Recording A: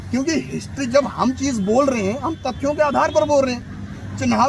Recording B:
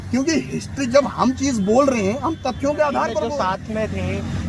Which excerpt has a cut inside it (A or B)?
B